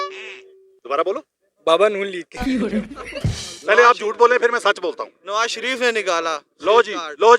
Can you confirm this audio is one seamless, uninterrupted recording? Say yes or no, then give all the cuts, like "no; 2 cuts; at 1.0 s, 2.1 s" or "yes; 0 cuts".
no; 2 cuts; at 2.3 s, 3.0 s